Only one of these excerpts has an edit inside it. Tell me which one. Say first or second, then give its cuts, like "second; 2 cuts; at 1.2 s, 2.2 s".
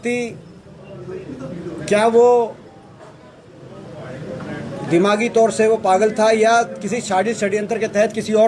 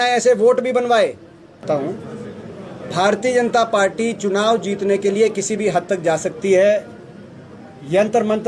second; 1 cut; at 1.6 s